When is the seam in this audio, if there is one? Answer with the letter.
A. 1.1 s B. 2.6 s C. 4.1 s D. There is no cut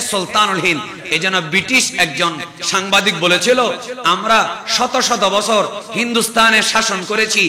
B